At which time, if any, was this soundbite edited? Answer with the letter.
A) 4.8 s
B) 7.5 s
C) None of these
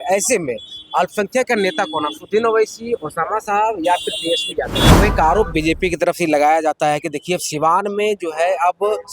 A